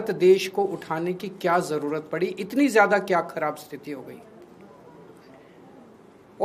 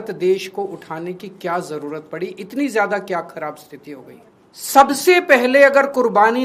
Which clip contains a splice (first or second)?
second